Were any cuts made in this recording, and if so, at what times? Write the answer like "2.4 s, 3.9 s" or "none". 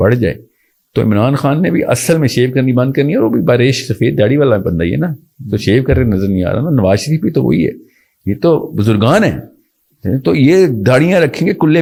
none